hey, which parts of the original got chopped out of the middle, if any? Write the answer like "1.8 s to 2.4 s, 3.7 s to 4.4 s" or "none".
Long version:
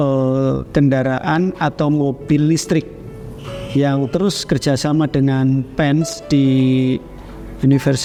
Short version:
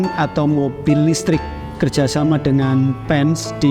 3.1 s to 4.4 s